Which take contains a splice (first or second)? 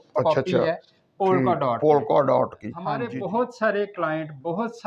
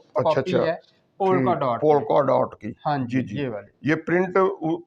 first